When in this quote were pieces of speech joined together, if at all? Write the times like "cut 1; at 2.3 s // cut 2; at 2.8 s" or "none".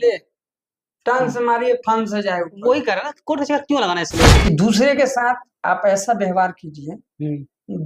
cut 1; at 4.3 s